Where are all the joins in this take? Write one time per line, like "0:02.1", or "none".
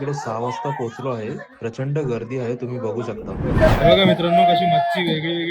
0:03.6